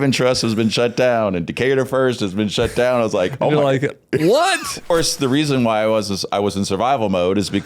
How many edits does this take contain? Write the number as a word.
one